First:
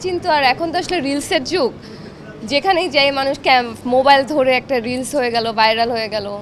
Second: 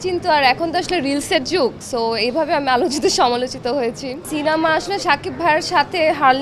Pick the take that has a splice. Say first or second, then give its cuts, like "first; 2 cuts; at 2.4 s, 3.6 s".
second; 2 cuts; at 1.8 s, 4.3 s